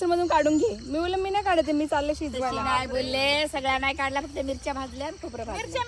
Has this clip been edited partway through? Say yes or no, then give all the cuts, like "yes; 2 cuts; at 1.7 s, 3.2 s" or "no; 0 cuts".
no; 0 cuts